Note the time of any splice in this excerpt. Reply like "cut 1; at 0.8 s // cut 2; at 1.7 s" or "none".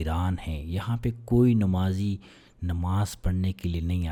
none